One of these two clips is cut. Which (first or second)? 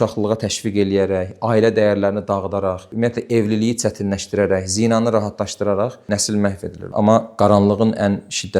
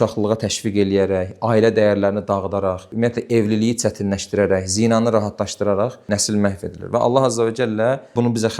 first